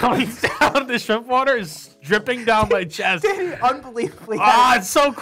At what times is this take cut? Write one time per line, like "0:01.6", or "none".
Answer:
none